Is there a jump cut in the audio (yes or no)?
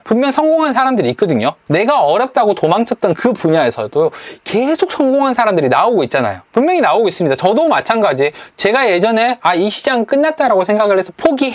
no